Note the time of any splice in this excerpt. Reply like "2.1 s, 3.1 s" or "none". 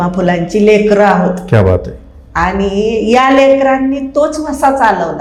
none